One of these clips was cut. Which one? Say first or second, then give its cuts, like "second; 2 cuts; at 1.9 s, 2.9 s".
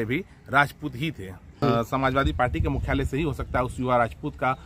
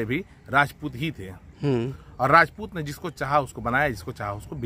first; 1 cut; at 1.6 s